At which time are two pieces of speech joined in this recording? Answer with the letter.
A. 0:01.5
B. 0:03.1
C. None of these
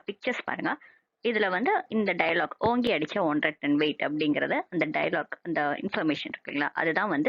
B